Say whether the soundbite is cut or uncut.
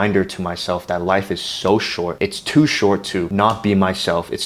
cut